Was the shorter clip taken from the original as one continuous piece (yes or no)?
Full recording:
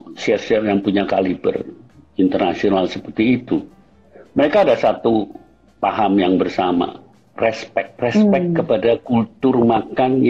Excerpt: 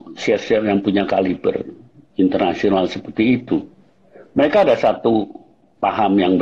yes